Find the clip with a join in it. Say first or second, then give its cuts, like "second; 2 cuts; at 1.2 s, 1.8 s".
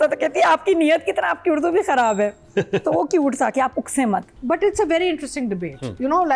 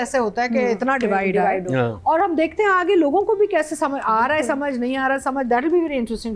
first; 1 cut; at 4.3 s